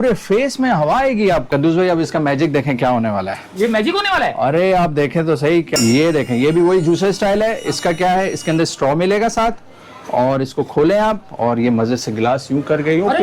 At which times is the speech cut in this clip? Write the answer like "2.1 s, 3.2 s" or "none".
1.4 s, 5.7 s